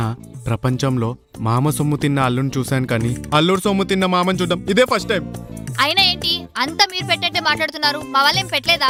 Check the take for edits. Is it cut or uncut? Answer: uncut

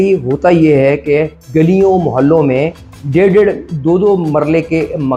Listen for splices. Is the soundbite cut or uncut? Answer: uncut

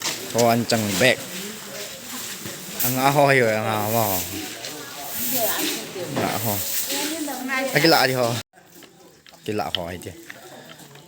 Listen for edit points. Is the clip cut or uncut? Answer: cut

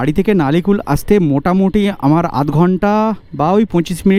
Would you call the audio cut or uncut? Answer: uncut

